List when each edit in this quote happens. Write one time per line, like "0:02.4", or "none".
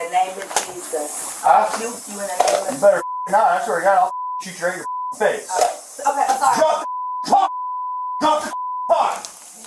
none